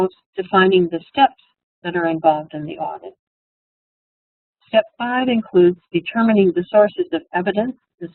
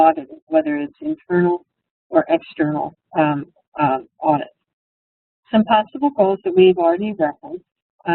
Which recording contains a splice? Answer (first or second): second